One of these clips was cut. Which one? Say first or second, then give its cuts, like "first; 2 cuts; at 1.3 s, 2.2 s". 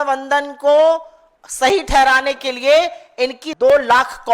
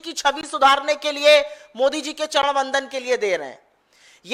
first; 1 cut; at 3.4 s